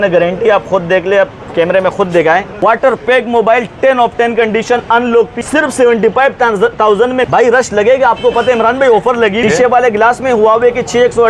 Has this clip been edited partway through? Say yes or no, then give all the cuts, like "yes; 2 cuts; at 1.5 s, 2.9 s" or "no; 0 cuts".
yes; 4 cuts; at 2.5 s, 5.4 s, 7.3 s, 9.4 s